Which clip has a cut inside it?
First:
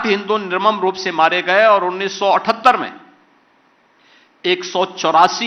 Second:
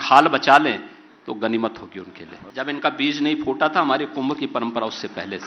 second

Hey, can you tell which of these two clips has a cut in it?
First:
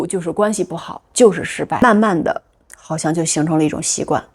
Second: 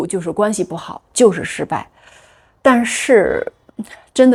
first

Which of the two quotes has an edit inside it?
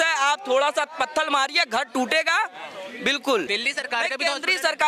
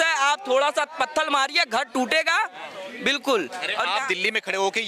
first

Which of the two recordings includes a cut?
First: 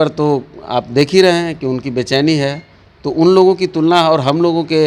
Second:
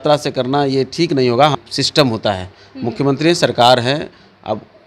second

